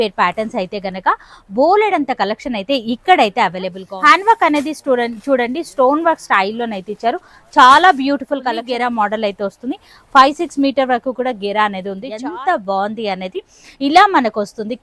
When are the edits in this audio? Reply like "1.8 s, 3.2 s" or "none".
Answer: 3.8 s, 8.6 s, 12.1 s